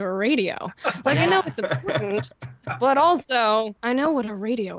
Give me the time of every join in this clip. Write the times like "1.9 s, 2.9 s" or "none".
none